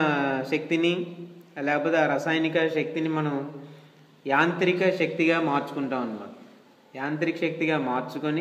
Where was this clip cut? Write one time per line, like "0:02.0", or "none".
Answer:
0:01.4